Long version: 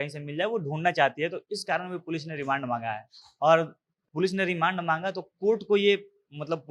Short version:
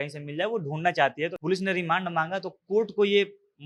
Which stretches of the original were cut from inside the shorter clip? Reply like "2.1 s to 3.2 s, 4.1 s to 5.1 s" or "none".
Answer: 1.4 s to 4.1 s